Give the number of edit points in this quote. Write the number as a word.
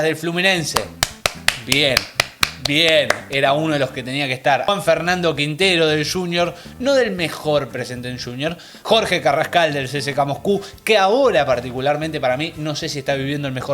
two